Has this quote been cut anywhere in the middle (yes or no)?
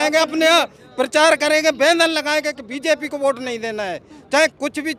no